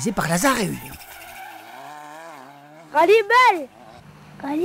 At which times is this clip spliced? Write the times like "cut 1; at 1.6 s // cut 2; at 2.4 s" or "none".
cut 1; at 1.0 s